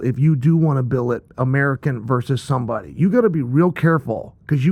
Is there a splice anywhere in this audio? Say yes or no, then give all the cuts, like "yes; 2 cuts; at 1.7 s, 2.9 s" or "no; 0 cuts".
no; 0 cuts